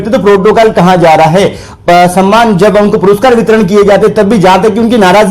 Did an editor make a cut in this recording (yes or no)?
no